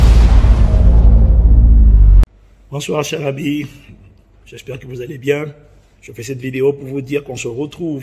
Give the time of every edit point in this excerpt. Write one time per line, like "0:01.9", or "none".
0:02.2